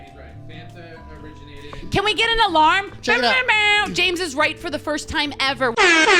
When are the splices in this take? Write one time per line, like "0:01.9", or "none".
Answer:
none